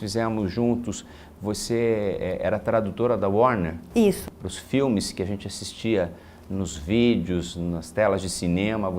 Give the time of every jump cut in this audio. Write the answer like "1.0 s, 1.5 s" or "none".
7.1 s